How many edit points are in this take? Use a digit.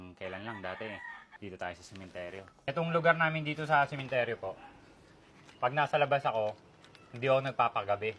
2